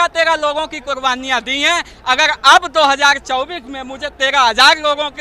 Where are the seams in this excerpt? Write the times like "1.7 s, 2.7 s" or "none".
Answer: none